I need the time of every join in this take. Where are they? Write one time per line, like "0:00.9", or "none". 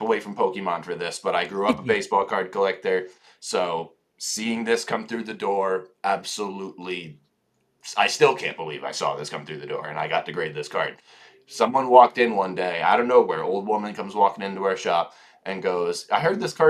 none